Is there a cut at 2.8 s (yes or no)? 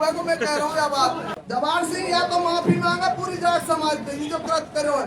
no